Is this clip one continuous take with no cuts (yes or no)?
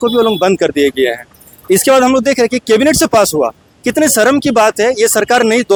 yes